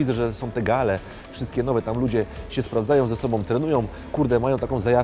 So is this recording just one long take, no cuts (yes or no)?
yes